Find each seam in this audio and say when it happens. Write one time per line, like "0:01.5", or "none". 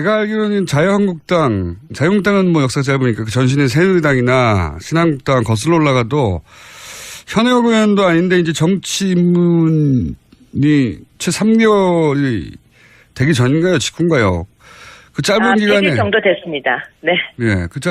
0:12.0